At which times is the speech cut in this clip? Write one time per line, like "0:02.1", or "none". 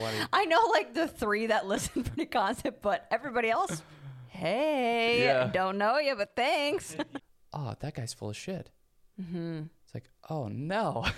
0:06.8

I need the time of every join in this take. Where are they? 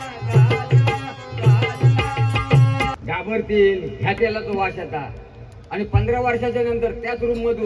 0:03.0

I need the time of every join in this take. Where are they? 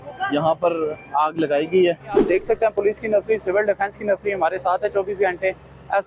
0:02.2

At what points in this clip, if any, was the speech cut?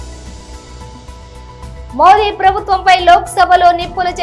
0:01.0

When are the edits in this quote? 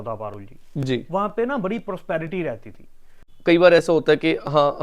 0:03.3

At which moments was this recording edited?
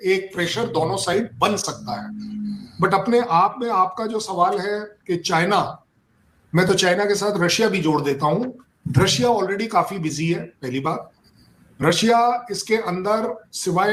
none

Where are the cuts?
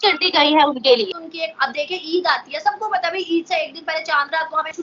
0:01.2

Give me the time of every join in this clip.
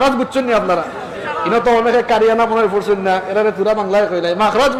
none

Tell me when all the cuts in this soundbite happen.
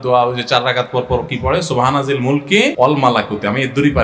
0:02.7

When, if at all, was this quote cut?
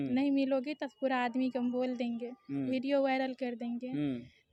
none

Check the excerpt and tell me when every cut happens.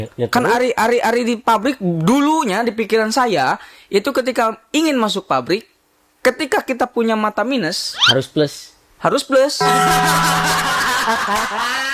none

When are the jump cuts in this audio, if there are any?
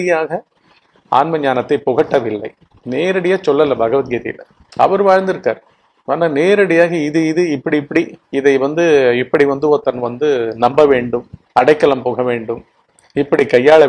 none

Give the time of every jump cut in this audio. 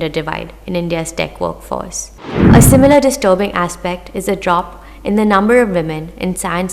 0:02.3

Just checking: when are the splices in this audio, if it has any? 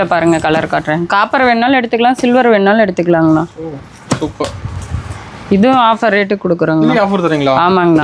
none

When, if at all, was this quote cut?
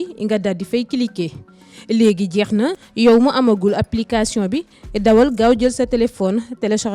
0:02.8

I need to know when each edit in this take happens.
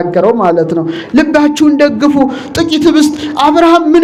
none

